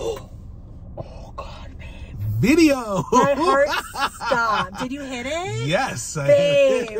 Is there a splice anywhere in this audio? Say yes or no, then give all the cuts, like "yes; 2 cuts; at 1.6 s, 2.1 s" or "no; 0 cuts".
no; 0 cuts